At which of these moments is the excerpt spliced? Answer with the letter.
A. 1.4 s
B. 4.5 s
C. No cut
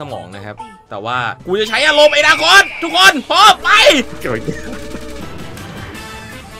A